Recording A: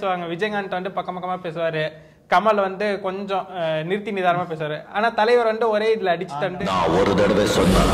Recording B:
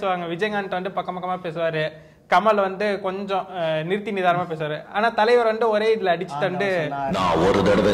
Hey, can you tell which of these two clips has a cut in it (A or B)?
A